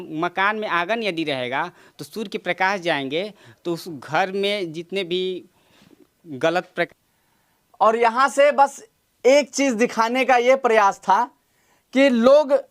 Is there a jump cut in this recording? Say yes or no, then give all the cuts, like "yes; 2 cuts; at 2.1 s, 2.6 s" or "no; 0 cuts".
yes; 1 cut; at 6.9 s